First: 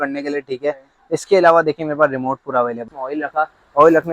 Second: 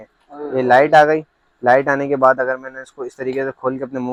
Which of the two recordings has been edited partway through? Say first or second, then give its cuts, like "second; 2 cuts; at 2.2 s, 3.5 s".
first; 1 cut; at 2.9 s